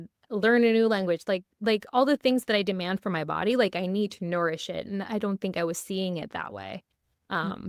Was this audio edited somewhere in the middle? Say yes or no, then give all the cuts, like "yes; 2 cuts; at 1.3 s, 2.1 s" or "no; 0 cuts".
no; 0 cuts